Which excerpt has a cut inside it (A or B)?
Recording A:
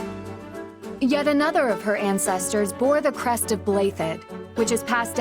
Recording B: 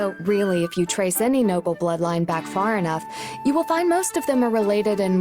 A